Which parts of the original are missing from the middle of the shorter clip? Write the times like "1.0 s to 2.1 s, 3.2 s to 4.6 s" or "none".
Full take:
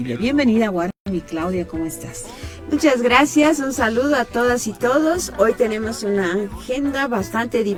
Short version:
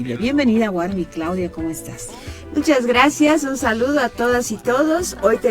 0.9 s to 1.1 s